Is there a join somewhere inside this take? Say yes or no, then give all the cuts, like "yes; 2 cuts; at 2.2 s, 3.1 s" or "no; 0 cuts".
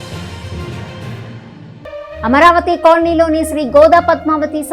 yes; 1 cut; at 1.4 s